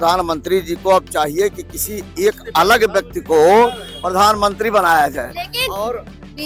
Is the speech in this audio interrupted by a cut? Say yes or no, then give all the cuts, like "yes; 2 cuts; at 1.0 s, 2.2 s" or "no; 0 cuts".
no; 0 cuts